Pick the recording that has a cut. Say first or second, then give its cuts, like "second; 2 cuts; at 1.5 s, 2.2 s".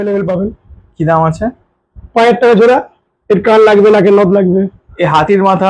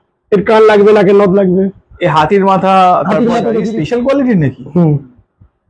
second; 1 cut; at 3.7 s